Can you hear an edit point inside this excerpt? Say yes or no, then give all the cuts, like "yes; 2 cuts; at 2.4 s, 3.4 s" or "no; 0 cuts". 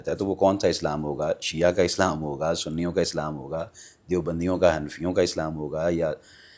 no; 0 cuts